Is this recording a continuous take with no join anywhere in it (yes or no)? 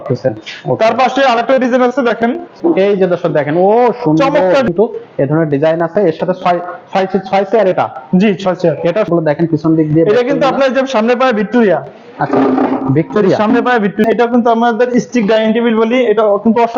no